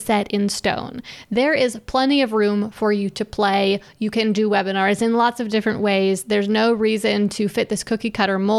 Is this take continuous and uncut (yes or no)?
yes